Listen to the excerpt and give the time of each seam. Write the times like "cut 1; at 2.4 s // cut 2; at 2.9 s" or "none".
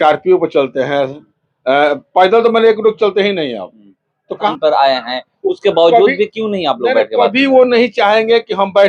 cut 1; at 4.5 s

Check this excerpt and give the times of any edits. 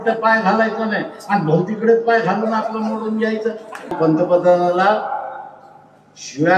cut 1; at 3.9 s

